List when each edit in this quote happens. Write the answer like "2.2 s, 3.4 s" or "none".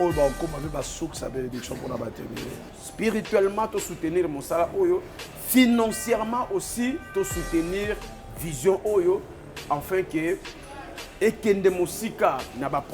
2.8 s